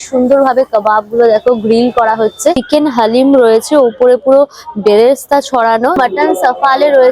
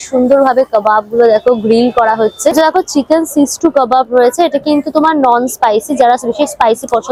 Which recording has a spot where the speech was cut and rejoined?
first; 2 cuts; at 2.5 s, 5.9 s

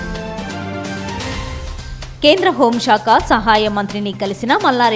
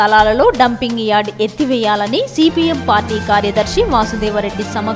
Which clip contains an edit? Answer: first; 1 cut; at 1.3 s

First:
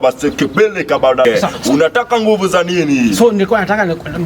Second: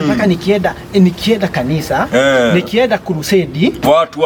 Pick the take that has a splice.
first; 1 cut; at 1.2 s

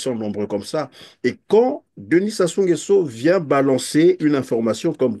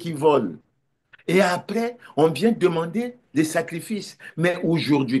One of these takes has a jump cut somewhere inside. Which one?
second; 1 cut; at 0.9 s

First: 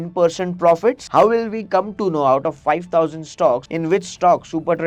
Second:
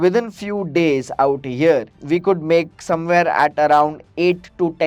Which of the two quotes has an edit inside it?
first; 2 cuts; at 1.0 s, 3.7 s

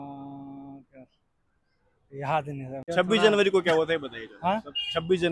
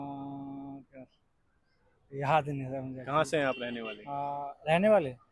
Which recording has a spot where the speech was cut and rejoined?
first; 1 cut; at 2.9 s

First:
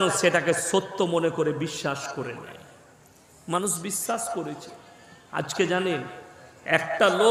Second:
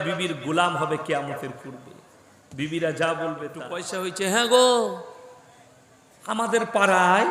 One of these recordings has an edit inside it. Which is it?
second; 1 cut; at 3.9 s

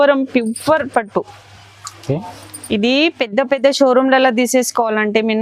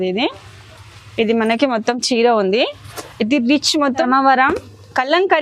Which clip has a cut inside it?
second; 1 cut; at 4.0 s

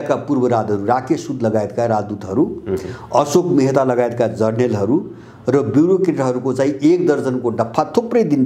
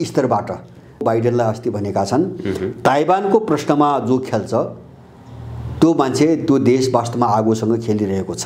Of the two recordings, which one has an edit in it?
second; 1 cut; at 1.0 s

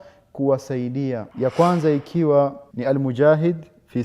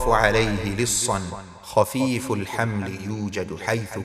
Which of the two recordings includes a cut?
first; 2 cuts; at 1.3 s, 2.7 s

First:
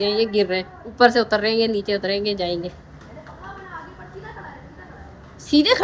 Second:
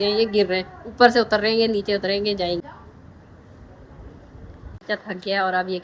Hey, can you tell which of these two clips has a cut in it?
second; 2 cuts; at 2.6 s, 4.8 s

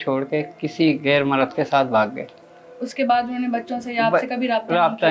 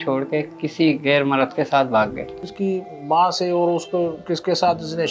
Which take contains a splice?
second; 1 cut; at 2.5 s

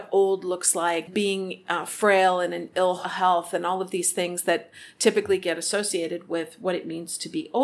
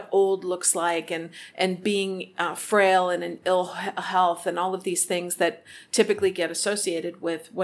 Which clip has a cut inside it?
first; 2 cuts; at 1.1 s, 3.1 s

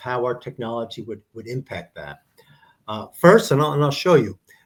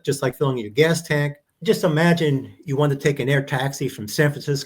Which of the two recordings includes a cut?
second; 1 cut; at 1.4 s

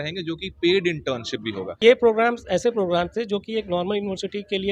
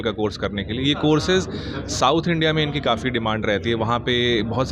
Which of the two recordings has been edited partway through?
first; 1 cut; at 1.8 s

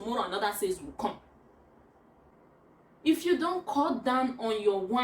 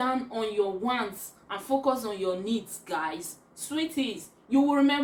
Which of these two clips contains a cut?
first; 1 cut; at 2.3 s

